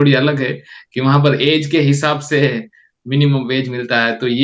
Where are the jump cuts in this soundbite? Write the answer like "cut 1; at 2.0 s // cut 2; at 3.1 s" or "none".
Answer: none